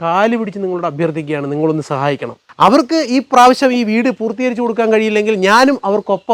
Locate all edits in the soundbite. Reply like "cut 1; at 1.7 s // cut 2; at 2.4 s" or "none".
cut 1; at 2.5 s